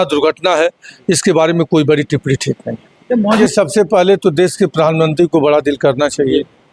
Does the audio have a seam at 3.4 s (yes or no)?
yes